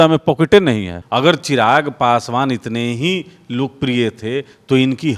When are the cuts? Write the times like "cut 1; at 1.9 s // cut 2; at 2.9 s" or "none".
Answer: cut 1; at 1.0 s

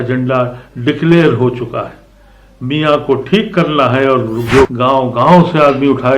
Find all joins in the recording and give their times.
cut 1; at 4.7 s

